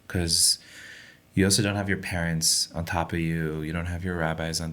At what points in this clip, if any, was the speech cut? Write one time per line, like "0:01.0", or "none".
none